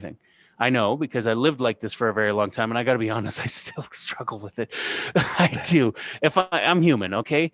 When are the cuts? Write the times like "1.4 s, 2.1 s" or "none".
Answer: none